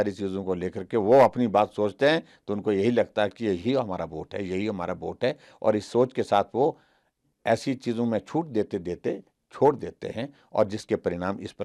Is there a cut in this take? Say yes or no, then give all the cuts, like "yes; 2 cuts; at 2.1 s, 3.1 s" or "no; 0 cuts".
no; 0 cuts